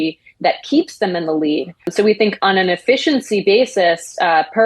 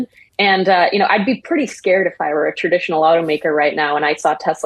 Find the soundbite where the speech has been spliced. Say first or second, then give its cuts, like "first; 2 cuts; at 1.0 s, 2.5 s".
first; 1 cut; at 1.9 s